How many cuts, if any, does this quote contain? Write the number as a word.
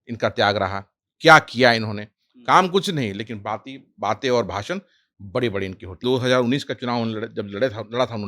one